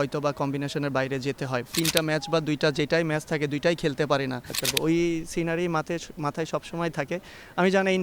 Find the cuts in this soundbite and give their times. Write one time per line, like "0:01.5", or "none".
0:01.7
0:04.6